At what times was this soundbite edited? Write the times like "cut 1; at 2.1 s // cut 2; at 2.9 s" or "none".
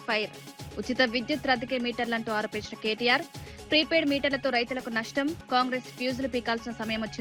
none